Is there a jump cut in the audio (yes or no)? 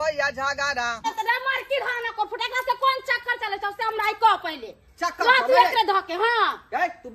yes